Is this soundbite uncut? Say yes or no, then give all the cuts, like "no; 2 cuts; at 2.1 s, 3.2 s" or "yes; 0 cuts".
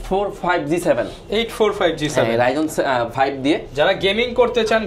yes; 0 cuts